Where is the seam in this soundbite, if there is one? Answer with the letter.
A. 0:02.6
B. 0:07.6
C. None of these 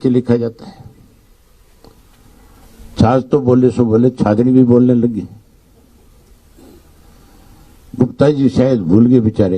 A